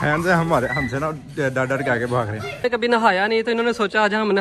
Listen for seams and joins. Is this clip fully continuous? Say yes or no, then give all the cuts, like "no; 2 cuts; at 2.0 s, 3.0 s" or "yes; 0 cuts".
no; 1 cut; at 2.6 s